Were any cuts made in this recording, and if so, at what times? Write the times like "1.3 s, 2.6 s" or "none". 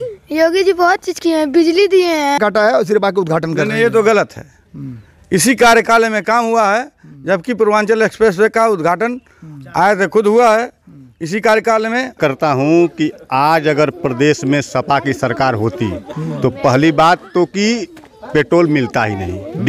2.4 s, 12.2 s